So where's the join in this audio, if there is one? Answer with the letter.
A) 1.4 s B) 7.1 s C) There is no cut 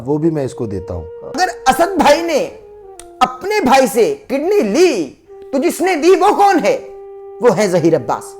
A